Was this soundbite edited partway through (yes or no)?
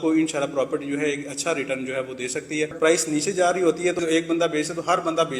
yes